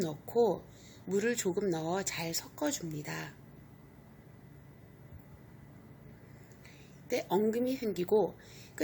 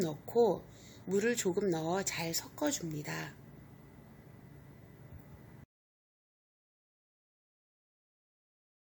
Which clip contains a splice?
first; 1 cut; at 5.6 s

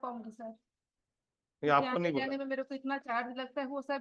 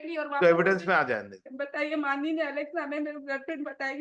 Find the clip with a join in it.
second; 1 cut; at 1.4 s

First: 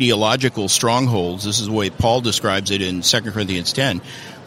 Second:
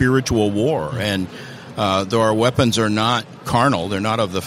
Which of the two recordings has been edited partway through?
second; 1 cut; at 3.4 s

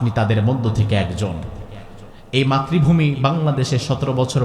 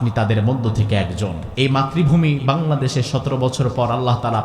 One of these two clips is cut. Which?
second; 1 cut; at 1.4 s

